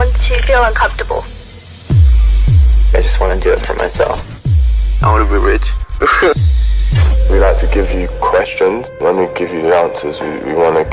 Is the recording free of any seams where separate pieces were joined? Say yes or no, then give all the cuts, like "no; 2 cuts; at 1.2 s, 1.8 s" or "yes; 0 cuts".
yes; 0 cuts